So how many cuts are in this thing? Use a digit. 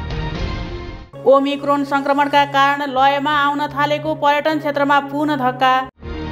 1